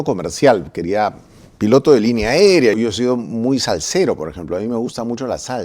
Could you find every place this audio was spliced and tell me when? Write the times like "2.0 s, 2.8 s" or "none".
2.7 s